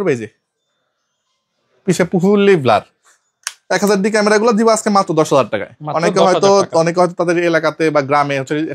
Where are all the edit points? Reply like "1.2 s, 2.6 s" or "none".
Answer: none